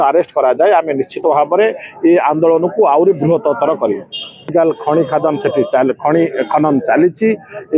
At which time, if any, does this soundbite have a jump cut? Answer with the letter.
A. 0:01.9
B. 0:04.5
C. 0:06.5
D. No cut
B